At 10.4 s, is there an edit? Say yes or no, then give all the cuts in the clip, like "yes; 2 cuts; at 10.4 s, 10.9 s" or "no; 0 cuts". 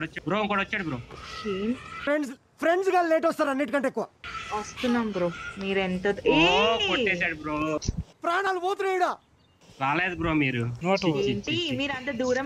no; 2 cuts; at 4.2 s, 8.0 s